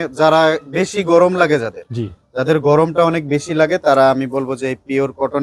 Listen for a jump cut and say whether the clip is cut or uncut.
uncut